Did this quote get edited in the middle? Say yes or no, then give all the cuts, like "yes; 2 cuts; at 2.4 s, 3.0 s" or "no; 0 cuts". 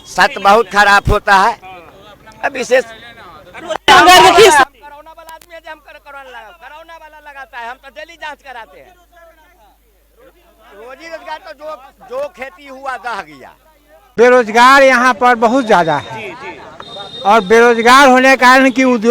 yes; 1 cut; at 14.0 s